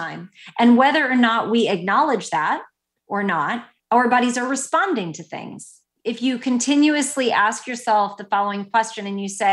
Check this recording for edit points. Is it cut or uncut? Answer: cut